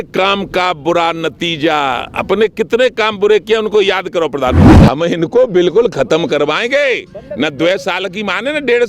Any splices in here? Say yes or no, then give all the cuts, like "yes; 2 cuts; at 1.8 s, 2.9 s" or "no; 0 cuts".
yes; 1 cut; at 4.8 s